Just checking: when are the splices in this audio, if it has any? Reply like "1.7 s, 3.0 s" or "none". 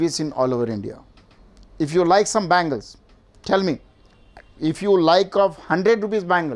none